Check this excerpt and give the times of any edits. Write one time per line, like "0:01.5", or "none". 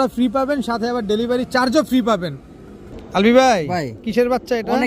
none